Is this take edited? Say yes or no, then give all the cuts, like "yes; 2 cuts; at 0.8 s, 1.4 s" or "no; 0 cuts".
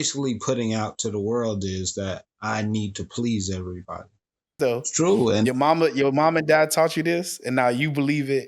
yes; 1 cut; at 4.5 s